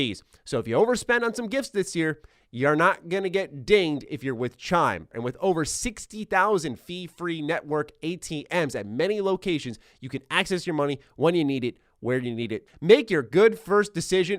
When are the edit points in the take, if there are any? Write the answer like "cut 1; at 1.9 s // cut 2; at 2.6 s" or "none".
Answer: cut 1; at 12.7 s